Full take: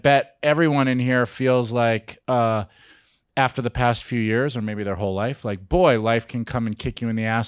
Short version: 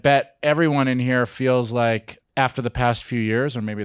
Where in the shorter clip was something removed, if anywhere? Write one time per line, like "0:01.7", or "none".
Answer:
0:02.1